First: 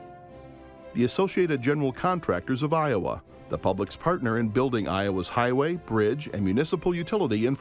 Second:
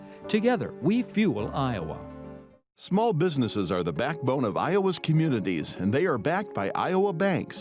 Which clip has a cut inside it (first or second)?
first